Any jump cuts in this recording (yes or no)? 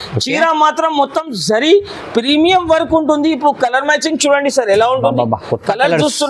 no